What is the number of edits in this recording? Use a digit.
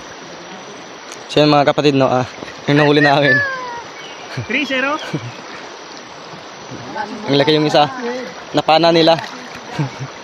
0